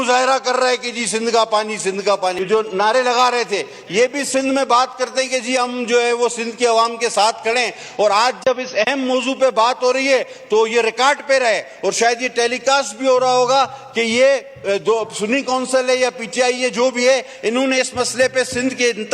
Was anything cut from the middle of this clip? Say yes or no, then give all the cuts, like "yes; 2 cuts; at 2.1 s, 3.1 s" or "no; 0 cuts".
yes; 1 cut; at 2.4 s